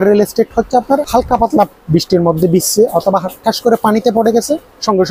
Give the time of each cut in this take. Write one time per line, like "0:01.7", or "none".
0:01.1